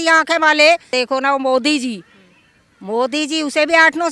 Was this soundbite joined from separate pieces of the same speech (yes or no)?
no